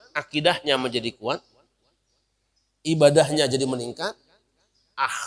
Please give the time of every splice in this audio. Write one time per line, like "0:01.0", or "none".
none